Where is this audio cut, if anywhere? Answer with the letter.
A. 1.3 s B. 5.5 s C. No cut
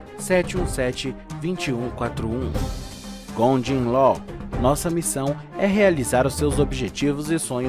C